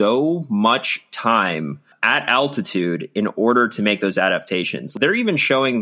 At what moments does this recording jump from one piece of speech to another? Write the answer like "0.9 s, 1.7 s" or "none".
1.9 s, 4.9 s